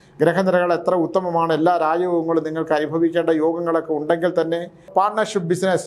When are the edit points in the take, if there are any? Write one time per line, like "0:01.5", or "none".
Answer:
0:04.9